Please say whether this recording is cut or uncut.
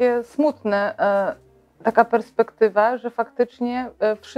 uncut